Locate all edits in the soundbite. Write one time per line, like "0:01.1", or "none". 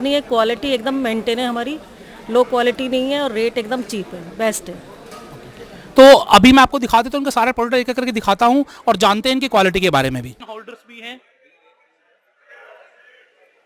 none